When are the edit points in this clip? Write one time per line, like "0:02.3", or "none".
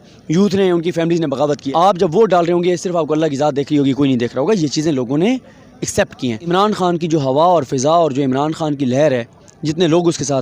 0:01.6
0:06.5